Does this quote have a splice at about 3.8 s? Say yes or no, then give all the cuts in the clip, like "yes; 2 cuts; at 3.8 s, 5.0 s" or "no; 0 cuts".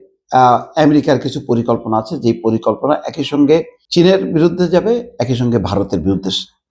yes; 1 cut; at 3.8 s